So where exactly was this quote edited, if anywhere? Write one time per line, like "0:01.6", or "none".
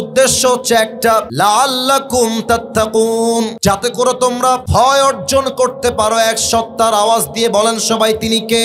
0:01.3
0:03.5
0:04.6